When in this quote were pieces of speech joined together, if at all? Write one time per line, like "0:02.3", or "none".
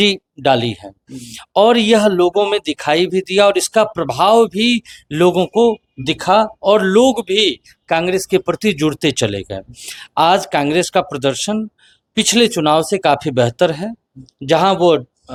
none

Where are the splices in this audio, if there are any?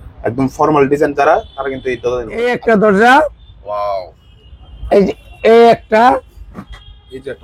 0:02.4

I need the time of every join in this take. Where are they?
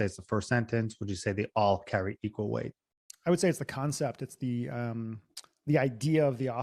none

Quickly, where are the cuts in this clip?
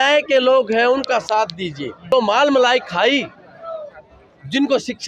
0:02.0

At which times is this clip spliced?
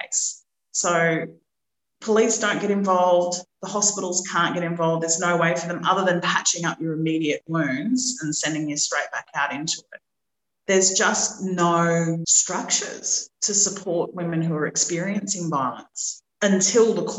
0:12.4

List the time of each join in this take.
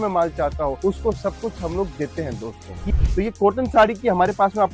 0:02.7

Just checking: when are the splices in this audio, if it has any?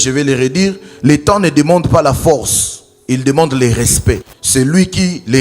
0:04.3

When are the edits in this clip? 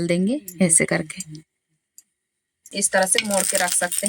0:02.7

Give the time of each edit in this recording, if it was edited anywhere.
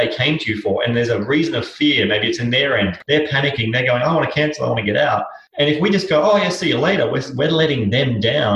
0:03.0
0:05.4

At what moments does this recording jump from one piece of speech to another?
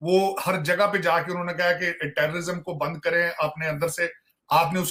none

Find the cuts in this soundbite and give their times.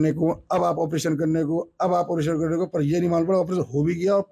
none

